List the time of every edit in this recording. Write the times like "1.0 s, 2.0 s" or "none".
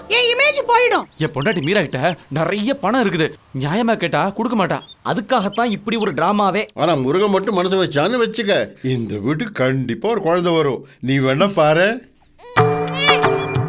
1.1 s, 6.7 s